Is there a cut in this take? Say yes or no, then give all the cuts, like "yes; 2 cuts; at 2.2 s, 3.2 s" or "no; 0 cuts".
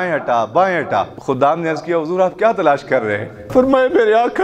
yes; 2 cuts; at 1.1 s, 3.4 s